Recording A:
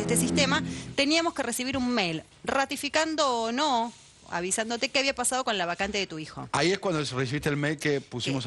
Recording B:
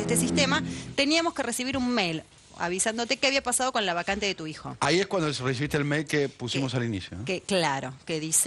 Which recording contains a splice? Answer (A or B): B